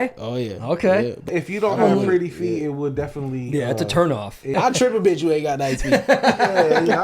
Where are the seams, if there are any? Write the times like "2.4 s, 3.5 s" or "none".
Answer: 1.3 s, 4.5 s